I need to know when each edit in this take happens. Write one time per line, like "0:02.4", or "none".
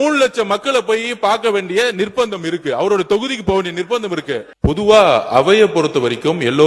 0:04.5

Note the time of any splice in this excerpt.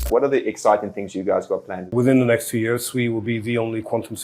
0:01.9

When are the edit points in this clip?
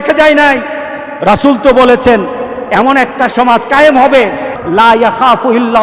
0:04.5

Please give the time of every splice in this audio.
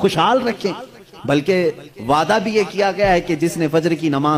none

